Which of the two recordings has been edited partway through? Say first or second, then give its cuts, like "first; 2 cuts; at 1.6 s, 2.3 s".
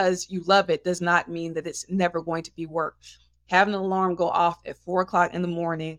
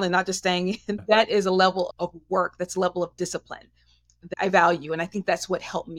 second; 2 cuts; at 1.0 s, 4.2 s